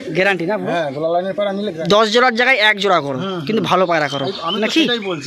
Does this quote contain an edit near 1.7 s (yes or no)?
yes